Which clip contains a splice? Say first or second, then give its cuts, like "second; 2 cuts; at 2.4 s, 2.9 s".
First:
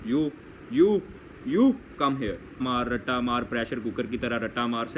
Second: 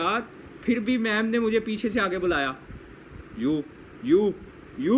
first; 1 cut; at 2.6 s